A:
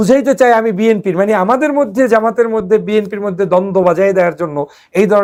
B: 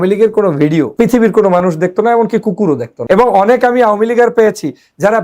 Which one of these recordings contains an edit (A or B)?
B